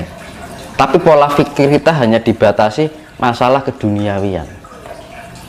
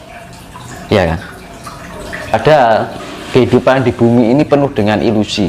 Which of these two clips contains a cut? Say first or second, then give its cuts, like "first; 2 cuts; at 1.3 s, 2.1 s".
second; 1 cut; at 2.3 s